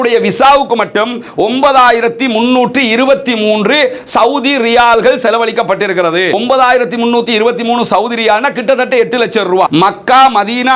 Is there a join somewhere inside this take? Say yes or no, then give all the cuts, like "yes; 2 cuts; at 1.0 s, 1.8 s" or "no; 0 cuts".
no; 0 cuts